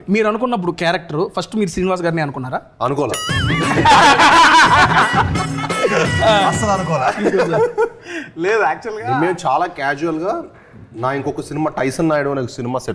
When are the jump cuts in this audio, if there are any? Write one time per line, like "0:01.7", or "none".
none